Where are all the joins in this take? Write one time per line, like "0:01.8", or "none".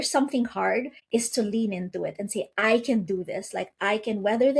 0:01.0